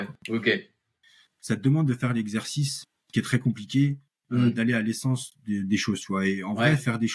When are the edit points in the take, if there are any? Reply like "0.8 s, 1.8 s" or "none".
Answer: 1.0 s